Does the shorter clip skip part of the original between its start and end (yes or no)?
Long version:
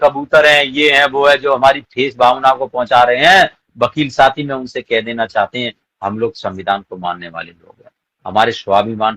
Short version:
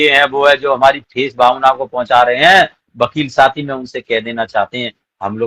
no